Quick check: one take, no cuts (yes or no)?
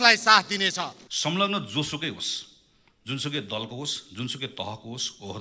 no